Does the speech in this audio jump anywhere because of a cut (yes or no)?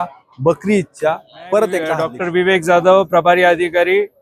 yes